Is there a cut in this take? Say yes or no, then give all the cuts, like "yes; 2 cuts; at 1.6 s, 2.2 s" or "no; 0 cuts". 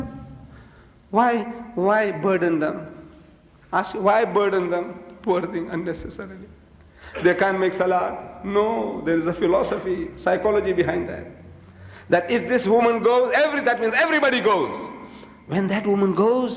yes; 1 cut; at 5.1 s